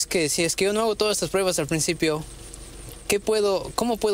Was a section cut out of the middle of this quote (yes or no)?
no